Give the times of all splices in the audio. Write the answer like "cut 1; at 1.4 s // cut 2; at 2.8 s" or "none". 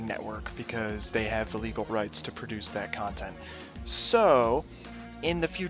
cut 1; at 1.0 s